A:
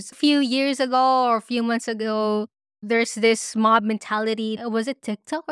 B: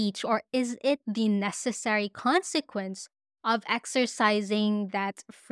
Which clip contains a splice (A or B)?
A